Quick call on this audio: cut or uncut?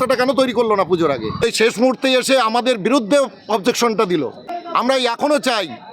cut